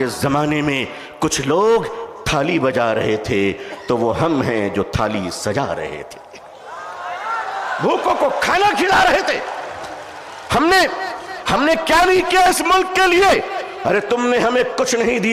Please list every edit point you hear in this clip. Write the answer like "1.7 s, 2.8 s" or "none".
none